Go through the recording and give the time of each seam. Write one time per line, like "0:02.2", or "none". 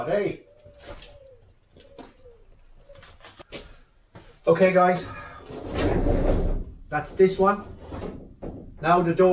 0:03.4